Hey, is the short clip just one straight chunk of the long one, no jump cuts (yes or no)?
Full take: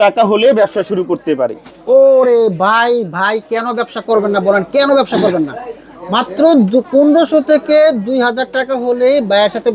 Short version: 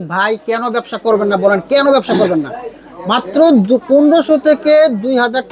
yes